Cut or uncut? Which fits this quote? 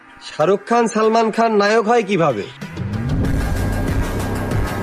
uncut